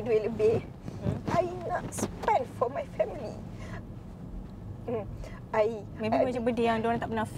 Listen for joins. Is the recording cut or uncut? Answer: uncut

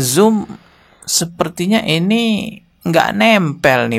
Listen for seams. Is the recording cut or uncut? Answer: uncut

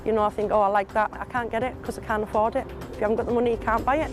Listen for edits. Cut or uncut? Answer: cut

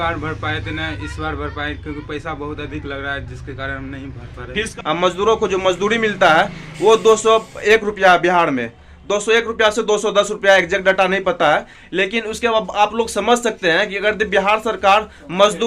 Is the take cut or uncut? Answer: cut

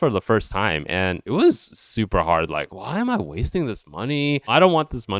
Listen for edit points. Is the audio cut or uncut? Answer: cut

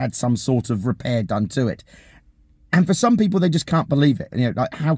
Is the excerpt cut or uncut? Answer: uncut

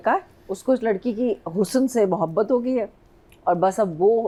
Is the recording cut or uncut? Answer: uncut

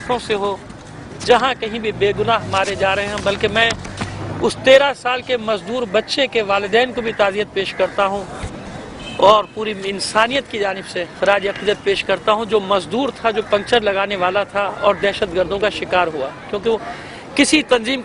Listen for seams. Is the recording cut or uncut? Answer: cut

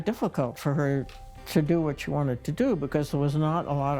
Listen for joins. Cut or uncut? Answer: uncut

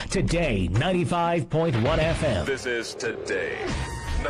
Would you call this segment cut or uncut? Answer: cut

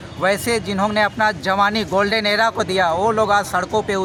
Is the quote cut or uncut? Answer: uncut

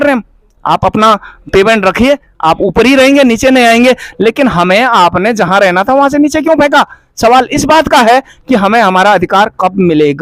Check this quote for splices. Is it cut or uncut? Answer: uncut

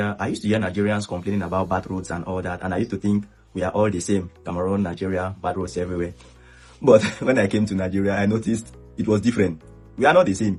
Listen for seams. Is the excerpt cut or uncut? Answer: uncut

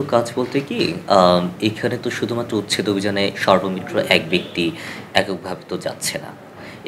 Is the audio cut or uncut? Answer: uncut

